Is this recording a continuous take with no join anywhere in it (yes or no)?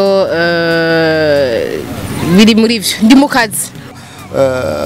no